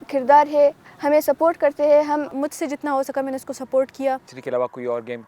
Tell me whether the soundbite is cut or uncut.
cut